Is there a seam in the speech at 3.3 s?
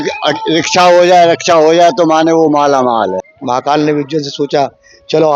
yes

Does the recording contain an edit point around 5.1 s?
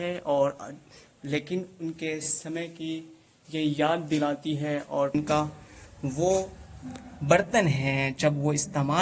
yes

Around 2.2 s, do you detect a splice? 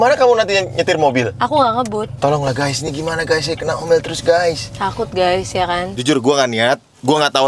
yes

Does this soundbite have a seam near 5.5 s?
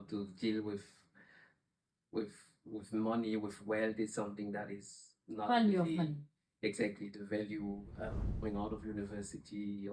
no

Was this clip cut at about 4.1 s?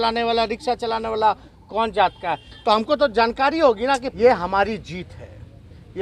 yes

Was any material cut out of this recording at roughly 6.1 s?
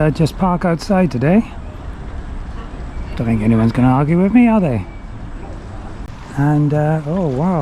yes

